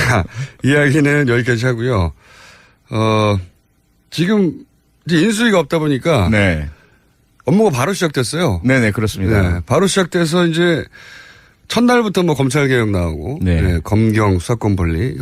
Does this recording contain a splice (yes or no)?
no